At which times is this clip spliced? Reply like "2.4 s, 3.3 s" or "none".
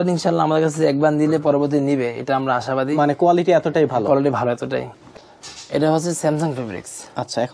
4.9 s